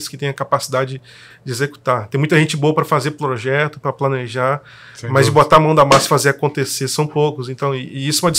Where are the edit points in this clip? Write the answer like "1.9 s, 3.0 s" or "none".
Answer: none